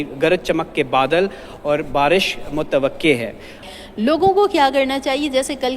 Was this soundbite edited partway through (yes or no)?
yes